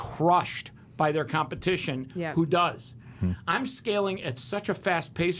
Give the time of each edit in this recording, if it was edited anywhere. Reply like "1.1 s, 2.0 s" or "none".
none